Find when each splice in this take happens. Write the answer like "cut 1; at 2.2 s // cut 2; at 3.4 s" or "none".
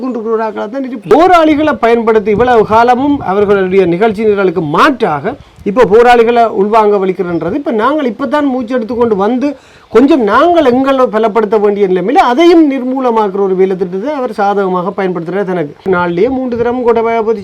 cut 1; at 1.1 s // cut 2; at 15.9 s